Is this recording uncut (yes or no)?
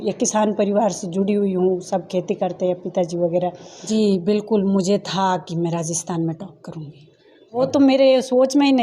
no